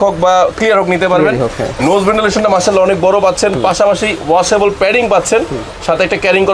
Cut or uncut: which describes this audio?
uncut